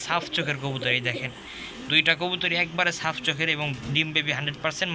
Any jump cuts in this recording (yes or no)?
no